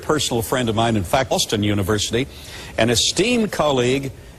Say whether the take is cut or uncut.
uncut